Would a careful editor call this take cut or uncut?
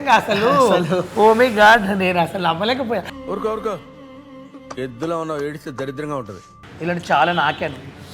cut